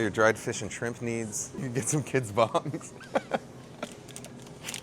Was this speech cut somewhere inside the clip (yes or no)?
yes